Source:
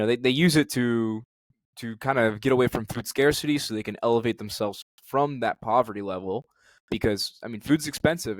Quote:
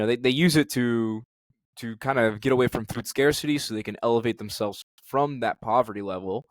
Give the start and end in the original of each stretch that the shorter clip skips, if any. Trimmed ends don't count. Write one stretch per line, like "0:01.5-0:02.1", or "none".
none